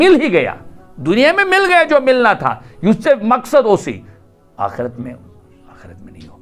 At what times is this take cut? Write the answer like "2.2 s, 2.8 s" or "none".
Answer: none